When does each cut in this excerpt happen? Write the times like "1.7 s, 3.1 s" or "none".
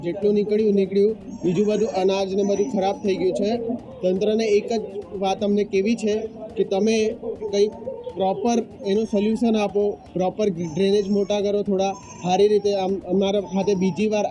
none